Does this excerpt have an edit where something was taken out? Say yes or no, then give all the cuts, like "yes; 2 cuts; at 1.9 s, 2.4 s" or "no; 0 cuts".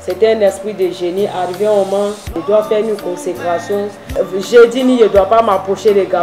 yes; 2 cuts; at 2.4 s, 4.2 s